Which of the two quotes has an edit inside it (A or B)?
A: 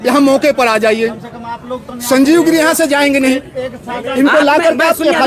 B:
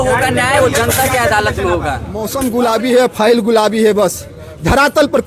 B